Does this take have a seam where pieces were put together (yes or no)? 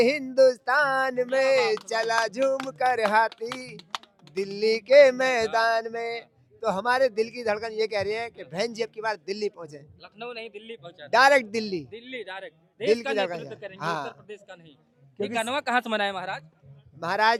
no